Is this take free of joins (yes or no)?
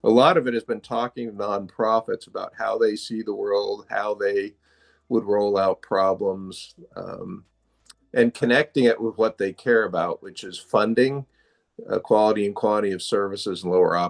yes